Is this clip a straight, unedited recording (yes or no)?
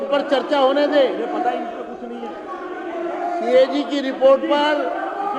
yes